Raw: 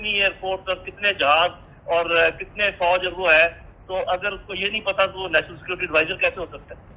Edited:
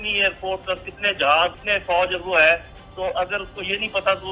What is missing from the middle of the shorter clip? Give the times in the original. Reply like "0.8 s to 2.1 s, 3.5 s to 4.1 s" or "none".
1.6 s to 2.5 s

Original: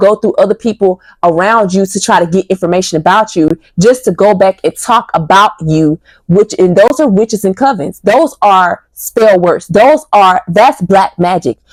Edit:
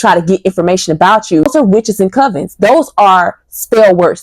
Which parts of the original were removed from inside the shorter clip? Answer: 3.5 s to 6.9 s

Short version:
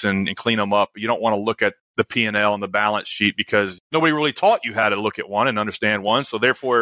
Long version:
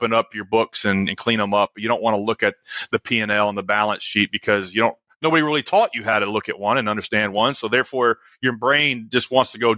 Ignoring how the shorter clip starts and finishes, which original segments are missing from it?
2.6 s to 2.8 s, 4.7 s to 5.0 s

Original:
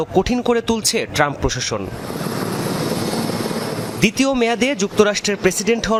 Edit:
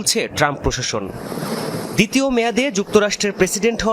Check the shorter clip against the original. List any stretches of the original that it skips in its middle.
2.3 s to 3.5 s

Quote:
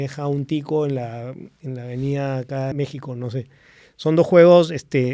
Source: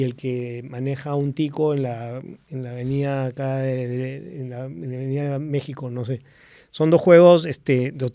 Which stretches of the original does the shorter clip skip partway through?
3.6 s to 5.5 s

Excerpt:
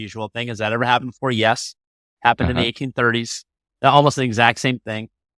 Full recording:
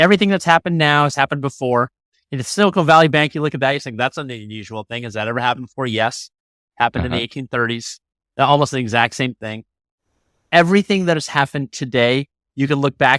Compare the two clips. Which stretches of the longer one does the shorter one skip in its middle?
none

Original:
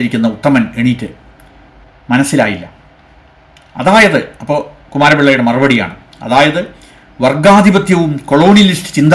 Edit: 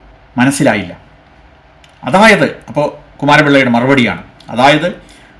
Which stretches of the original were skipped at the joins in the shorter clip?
none

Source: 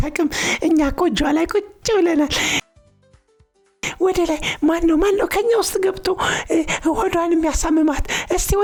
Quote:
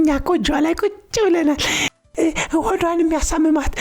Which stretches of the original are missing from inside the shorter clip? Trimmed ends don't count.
2.8 s to 6.4 s

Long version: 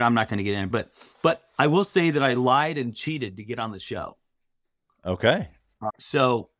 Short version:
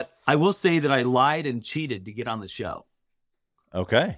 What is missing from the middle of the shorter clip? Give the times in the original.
none

